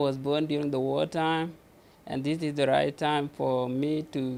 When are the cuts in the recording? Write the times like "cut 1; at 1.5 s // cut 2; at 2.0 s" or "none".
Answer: none